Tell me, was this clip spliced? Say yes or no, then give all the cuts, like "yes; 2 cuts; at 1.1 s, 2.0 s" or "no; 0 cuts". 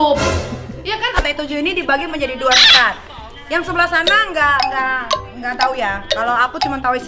yes; 1 cut; at 1.2 s